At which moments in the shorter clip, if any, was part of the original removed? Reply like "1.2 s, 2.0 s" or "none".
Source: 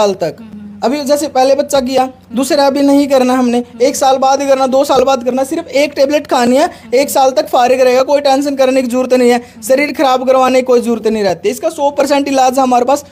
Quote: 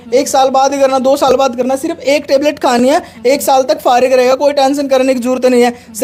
none

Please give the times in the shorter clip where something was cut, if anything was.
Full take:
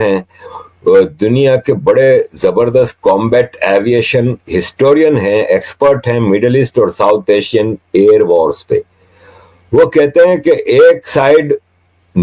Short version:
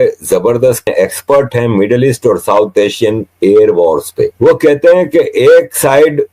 0.9 s, 4.3 s

